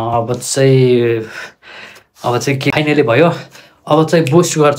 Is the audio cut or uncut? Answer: cut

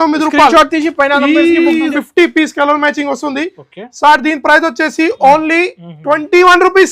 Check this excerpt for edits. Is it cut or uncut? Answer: cut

